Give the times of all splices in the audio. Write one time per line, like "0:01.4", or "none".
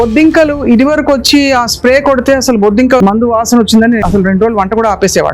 0:03.0
0:04.0